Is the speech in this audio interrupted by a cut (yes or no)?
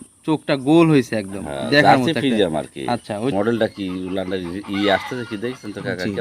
yes